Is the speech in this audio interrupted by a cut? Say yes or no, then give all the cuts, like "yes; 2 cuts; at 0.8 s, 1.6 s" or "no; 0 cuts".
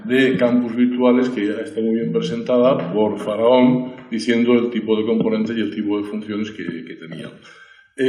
yes; 1 cut; at 3.6 s